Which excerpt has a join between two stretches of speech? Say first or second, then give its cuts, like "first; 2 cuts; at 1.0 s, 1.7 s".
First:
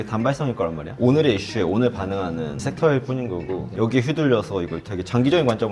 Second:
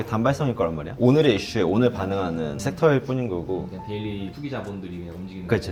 first; 1 cut; at 3.7 s